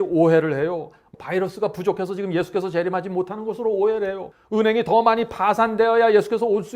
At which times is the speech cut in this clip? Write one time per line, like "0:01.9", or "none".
0:01.0
0:04.3